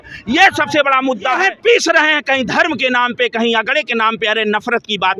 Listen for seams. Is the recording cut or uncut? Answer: cut